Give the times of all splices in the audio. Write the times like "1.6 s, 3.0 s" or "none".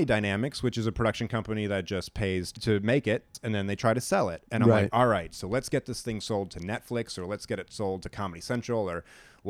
2.5 s, 3.3 s